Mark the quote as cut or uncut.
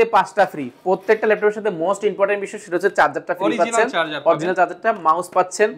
uncut